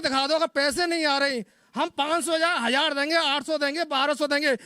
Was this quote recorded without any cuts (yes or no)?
yes